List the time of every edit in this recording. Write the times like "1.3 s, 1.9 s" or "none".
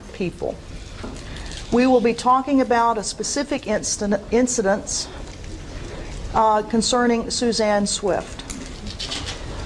7.1 s